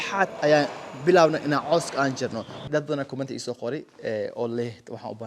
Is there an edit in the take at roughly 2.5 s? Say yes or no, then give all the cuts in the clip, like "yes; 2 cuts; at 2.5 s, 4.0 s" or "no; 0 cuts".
yes; 1 cut; at 2.5 s